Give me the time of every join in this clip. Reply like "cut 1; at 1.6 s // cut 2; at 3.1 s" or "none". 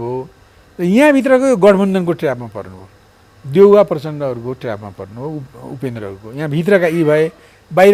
none